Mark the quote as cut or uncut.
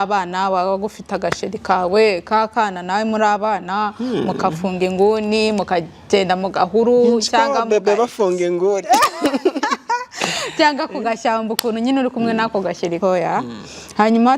cut